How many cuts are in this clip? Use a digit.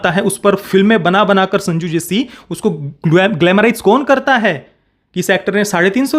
0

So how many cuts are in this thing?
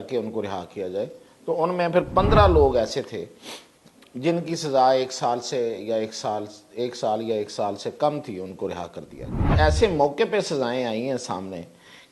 1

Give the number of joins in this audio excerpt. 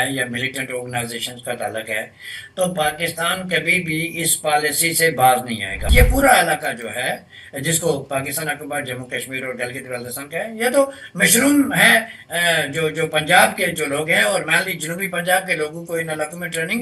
1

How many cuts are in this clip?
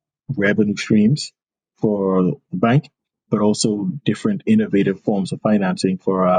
0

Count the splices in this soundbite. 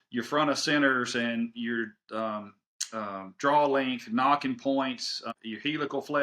1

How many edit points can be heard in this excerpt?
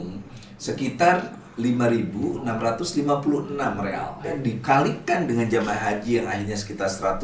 1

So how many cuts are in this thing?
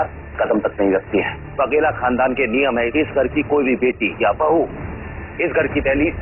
2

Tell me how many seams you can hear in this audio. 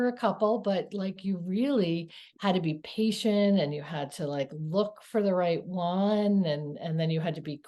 0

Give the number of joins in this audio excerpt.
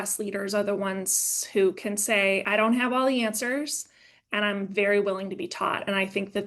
1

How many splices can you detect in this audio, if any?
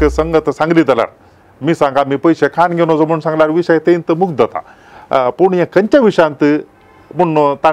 0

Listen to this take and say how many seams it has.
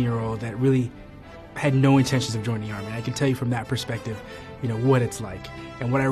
0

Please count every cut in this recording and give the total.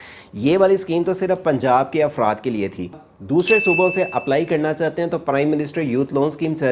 1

